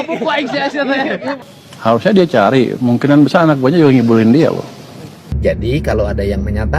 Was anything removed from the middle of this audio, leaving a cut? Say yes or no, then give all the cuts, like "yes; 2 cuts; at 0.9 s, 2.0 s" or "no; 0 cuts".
yes; 2 cuts; at 1.4 s, 5.3 s